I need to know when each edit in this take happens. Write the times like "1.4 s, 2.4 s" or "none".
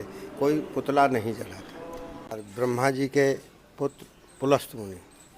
2.4 s